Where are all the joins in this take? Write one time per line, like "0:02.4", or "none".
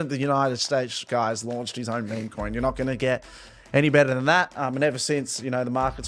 none